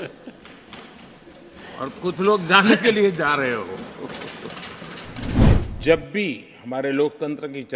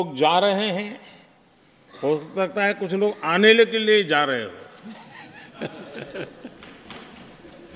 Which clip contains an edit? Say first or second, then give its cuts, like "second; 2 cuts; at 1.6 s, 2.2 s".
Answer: first; 1 cut; at 5.5 s